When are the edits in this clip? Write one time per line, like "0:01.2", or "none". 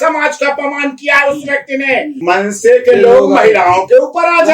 0:02.1